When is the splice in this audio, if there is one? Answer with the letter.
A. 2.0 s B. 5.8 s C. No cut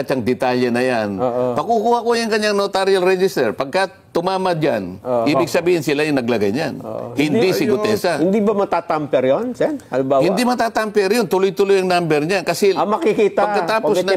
C